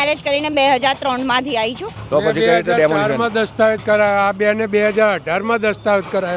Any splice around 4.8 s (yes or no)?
no